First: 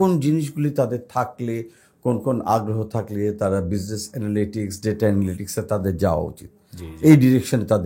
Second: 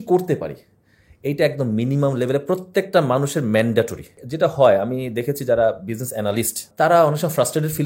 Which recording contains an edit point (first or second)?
second